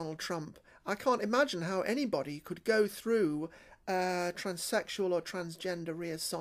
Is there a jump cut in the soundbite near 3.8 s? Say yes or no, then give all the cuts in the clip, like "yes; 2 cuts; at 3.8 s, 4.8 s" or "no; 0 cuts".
no; 0 cuts